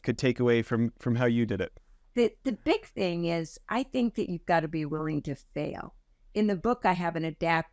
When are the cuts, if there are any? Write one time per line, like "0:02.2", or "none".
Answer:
0:02.1